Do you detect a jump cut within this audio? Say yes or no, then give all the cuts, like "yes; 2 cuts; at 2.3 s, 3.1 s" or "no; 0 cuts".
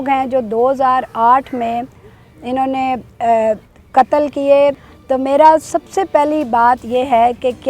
yes; 1 cut; at 4.9 s